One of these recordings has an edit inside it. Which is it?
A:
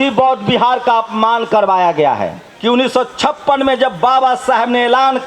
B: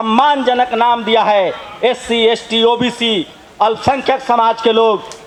A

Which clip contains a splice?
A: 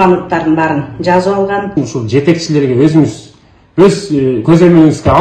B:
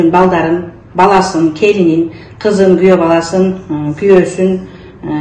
A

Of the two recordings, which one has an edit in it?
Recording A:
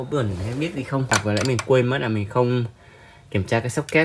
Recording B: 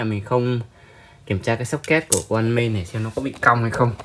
A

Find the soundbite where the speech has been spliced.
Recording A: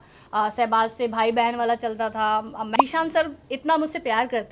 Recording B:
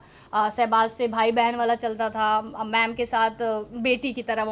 A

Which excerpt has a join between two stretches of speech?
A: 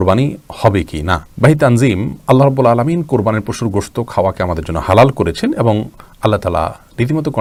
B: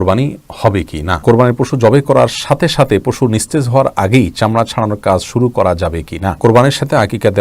B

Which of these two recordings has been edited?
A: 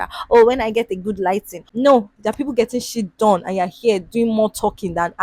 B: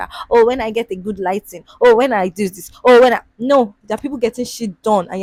A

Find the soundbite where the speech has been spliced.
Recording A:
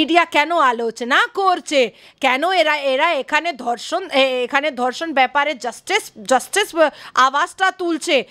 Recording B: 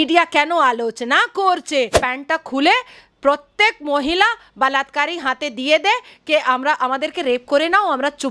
B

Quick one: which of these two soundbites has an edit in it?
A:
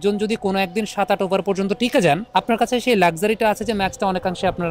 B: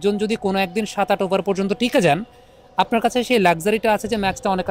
A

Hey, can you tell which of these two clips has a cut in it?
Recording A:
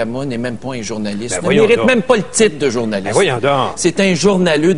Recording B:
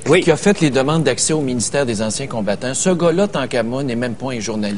B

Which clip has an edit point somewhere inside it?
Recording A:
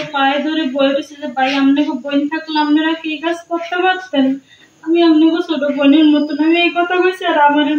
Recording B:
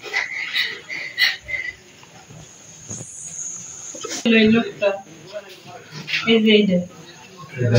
B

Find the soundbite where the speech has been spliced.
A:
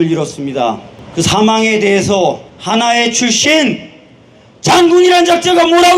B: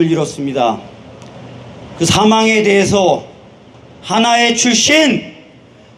A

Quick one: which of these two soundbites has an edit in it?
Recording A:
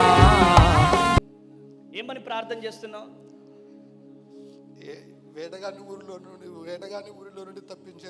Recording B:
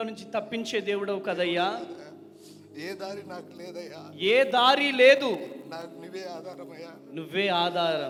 A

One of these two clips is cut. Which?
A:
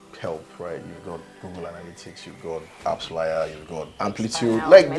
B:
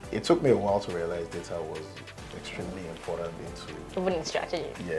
A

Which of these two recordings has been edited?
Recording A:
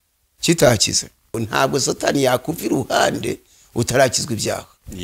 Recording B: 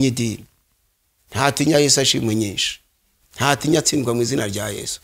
A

